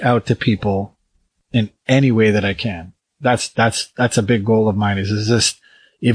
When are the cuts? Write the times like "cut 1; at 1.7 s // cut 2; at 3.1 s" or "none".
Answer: cut 1; at 1.4 s